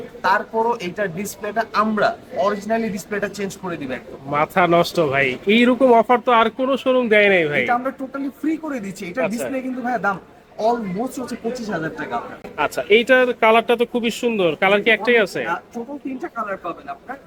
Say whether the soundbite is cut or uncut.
uncut